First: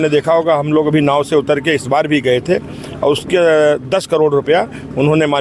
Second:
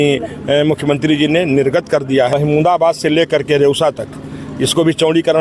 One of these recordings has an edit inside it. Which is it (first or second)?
second